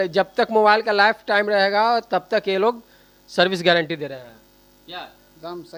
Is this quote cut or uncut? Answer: uncut